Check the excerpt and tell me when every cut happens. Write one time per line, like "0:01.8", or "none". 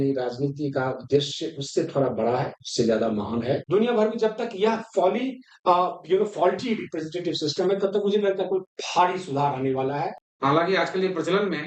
0:03.6
0:10.2